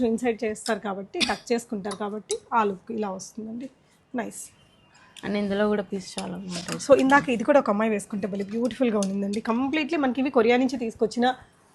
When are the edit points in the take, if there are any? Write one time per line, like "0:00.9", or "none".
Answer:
none